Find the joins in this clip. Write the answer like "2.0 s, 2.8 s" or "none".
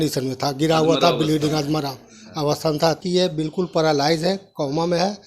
3.0 s